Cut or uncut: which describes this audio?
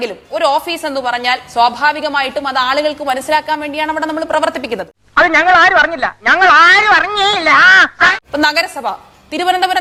uncut